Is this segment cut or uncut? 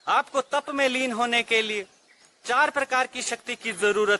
uncut